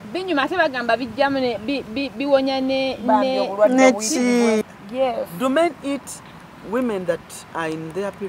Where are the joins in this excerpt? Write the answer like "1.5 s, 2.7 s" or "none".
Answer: 4.6 s